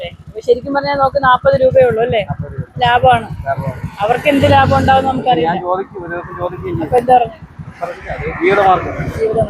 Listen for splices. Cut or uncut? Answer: uncut